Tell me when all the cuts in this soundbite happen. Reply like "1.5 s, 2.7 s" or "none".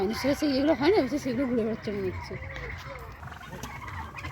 3.4 s